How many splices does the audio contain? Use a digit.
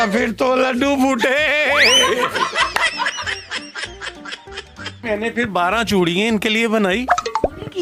0